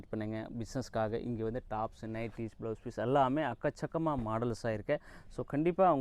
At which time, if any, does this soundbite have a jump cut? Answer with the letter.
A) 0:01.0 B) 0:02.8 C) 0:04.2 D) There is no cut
D